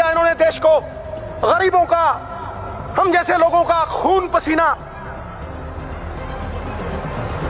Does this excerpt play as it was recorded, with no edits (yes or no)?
yes